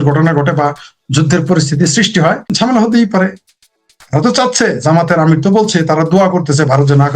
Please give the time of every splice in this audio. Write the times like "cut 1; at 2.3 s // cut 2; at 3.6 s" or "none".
cut 1; at 2.5 s